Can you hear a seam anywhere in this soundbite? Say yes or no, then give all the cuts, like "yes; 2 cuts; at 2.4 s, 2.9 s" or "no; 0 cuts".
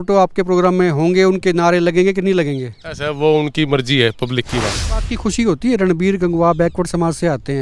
yes; 1 cut; at 4.8 s